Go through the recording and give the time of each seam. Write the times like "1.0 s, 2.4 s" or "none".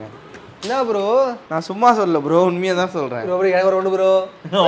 1.4 s